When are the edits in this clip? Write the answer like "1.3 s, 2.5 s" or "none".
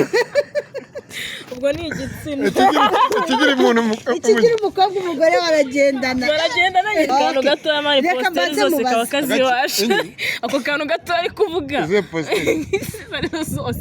7.1 s